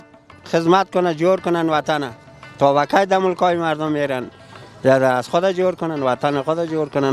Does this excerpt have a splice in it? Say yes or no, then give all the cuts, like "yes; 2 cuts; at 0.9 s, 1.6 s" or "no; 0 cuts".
no; 0 cuts